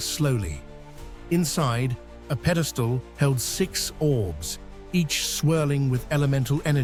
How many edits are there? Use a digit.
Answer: 0